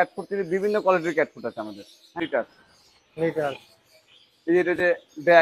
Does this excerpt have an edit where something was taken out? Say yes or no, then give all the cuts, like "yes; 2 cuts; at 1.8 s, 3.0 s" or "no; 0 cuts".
yes; 1 cut; at 2.2 s